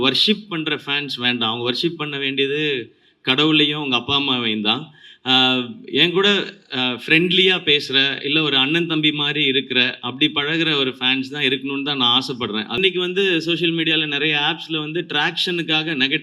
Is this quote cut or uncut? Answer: cut